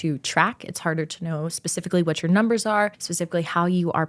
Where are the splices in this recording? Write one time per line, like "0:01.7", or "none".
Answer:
0:03.1